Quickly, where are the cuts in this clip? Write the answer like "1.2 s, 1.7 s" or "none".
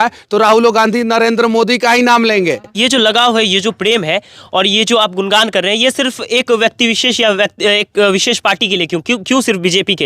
2.7 s